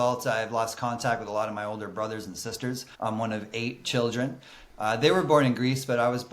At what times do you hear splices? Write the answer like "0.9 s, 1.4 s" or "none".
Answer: 2.9 s